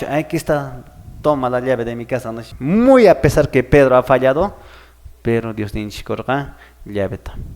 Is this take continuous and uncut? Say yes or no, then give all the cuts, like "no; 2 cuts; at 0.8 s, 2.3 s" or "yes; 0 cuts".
no; 1 cut; at 2.5 s